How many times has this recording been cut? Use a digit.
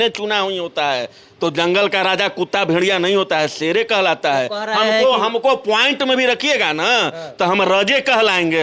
0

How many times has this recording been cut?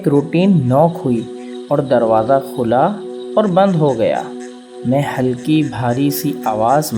0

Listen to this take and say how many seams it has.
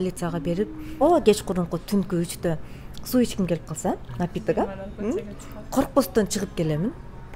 1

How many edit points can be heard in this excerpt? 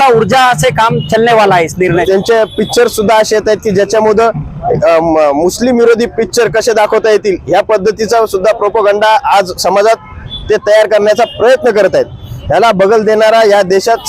1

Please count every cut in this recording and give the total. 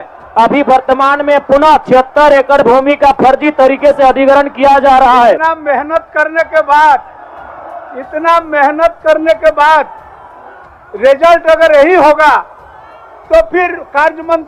1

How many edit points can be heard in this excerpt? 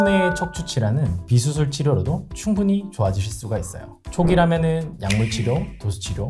1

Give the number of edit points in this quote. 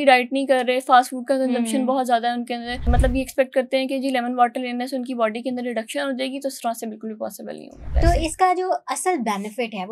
2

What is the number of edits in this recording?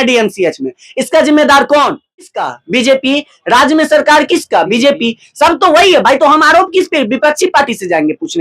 1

